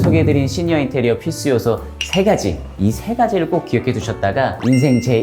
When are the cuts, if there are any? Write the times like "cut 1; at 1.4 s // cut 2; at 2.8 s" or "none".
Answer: cut 1; at 2.7 s